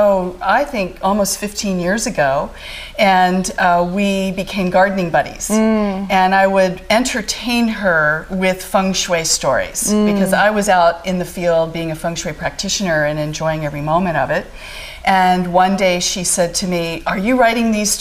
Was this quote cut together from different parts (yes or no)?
no